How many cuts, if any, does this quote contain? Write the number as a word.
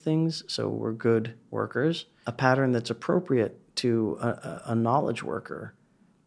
one